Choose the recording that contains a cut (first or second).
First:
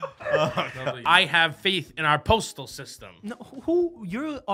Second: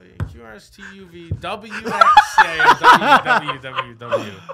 first